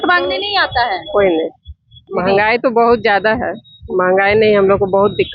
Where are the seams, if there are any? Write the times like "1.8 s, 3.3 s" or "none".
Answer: 2.0 s